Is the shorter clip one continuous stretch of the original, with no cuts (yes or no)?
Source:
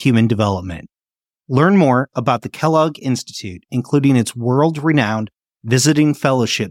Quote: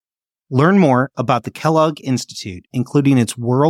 yes